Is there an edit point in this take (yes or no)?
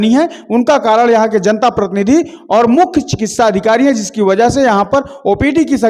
no